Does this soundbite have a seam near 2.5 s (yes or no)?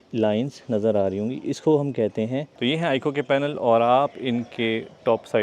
yes